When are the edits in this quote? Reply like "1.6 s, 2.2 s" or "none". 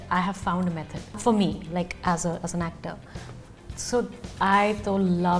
1.2 s